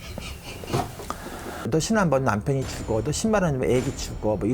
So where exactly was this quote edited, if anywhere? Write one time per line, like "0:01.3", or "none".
0:01.6